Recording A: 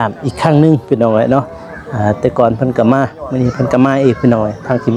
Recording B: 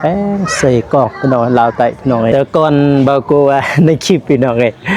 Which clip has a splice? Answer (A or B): B